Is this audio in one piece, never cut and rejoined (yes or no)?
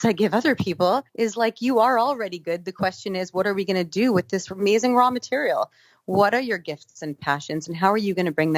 no